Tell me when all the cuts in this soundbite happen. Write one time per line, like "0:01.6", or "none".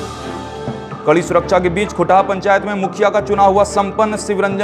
0:00.9